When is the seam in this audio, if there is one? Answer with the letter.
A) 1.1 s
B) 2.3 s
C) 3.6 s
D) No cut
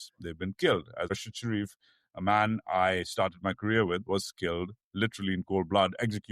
A